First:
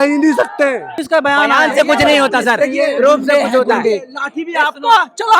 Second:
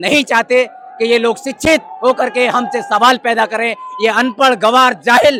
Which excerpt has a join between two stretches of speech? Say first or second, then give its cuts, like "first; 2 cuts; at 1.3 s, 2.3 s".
first; 1 cut; at 1.0 s